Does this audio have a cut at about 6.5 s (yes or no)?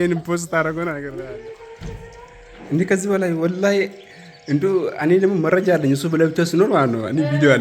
no